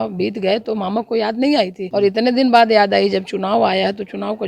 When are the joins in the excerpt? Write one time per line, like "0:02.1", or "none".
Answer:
0:01.8